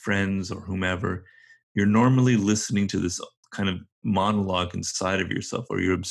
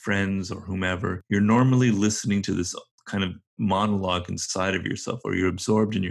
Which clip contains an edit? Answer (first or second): second